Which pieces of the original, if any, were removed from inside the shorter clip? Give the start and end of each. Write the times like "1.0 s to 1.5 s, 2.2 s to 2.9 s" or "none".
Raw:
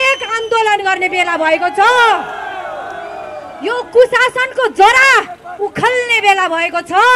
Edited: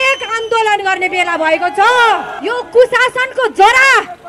2.3 s to 3.5 s

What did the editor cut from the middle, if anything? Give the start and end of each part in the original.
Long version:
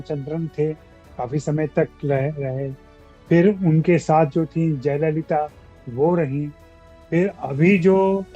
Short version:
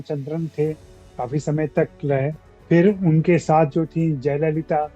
2.4 s to 3.0 s

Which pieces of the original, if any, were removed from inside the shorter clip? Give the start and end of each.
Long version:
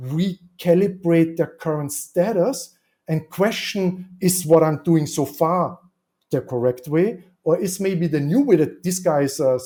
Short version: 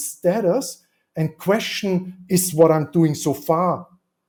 none

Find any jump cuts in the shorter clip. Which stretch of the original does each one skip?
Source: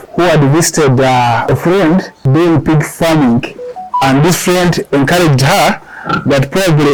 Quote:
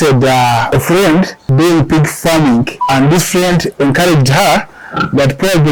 3.5 s to 3.9 s

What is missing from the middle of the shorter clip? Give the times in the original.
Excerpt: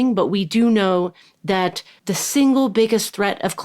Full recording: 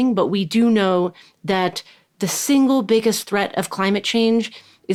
1.9 s to 2.0 s

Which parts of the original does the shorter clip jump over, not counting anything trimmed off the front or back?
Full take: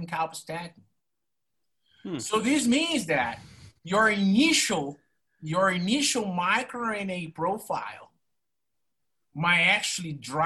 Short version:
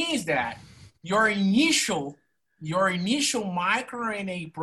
none

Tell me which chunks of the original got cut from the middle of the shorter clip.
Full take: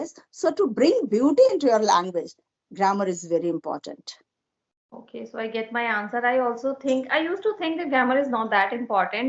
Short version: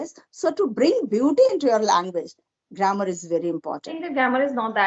3.9 s to 7.7 s

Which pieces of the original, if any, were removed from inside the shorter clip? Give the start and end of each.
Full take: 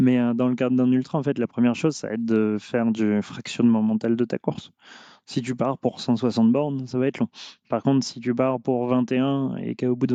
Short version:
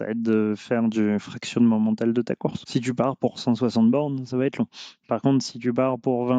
4.6 s to 5.2 s

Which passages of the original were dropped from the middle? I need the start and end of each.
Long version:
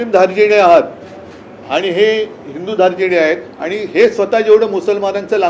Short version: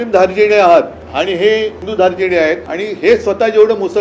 1.0 s to 1.6 s, 2.4 s to 2.6 s, 3.5 s to 3.6 s

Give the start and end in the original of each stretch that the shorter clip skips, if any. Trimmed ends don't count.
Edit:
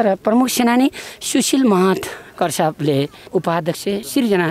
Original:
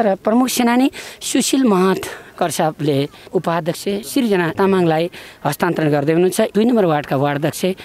none

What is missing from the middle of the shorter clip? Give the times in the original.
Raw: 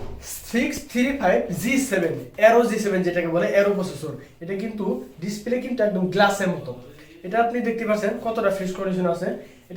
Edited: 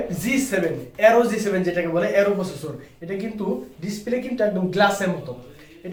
none

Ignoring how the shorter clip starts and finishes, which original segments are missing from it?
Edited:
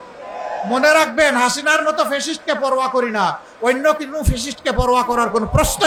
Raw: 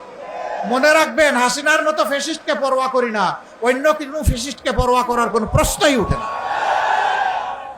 none

